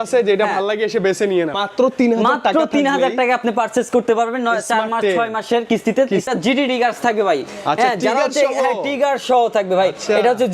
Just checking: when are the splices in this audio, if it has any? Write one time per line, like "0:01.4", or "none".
0:01.6
0:06.3